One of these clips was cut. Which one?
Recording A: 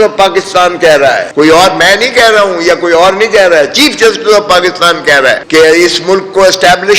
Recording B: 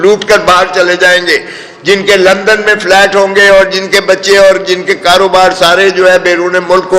A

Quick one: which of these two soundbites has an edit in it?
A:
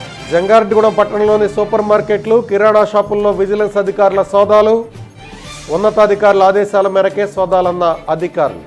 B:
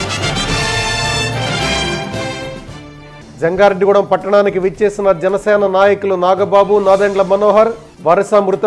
B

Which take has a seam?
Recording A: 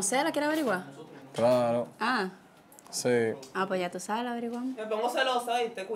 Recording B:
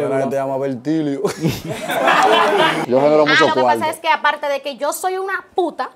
B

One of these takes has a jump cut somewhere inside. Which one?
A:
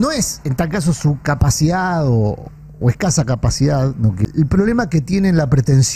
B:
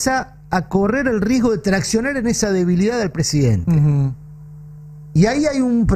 A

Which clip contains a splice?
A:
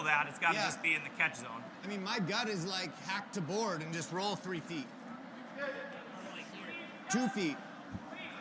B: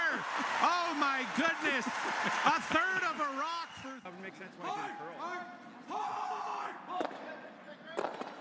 A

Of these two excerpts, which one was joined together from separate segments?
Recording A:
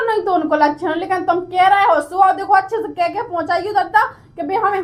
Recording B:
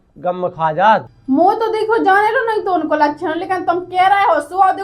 B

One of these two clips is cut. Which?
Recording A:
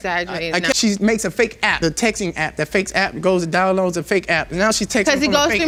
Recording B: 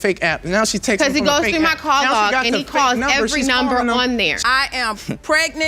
B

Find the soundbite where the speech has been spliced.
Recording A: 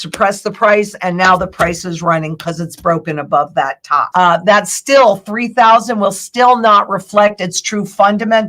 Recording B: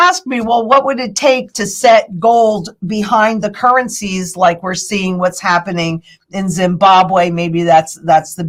A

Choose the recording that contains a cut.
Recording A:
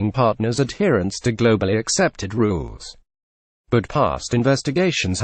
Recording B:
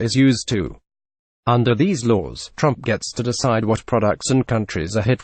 A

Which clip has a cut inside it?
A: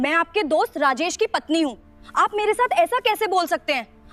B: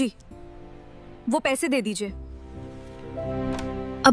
B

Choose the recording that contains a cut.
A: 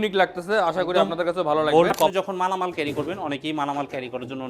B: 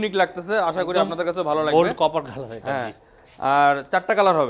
A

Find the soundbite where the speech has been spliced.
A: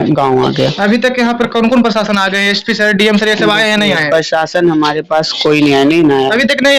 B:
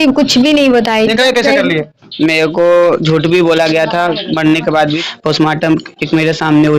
B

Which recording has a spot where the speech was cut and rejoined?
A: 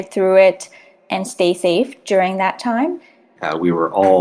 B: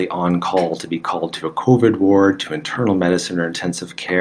A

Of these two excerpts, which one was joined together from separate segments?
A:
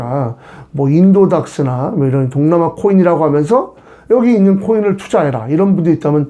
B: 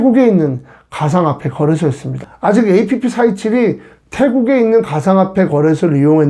B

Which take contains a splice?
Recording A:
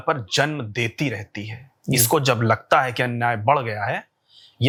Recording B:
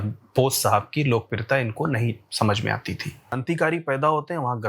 B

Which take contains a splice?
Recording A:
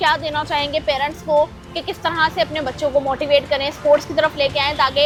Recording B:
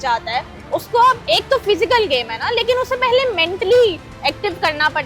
B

